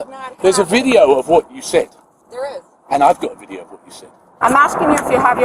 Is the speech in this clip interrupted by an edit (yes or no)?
yes